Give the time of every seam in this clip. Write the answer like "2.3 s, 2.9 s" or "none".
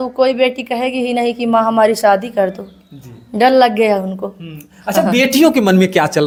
none